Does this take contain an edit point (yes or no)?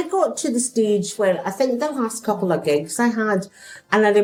no